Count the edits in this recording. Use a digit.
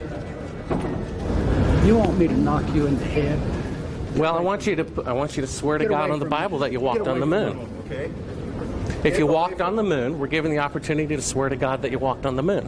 1